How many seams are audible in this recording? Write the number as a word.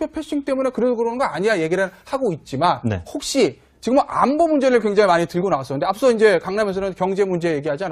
one